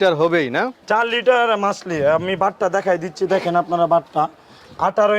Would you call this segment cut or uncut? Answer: uncut